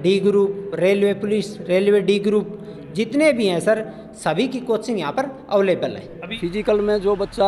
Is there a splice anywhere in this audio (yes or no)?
yes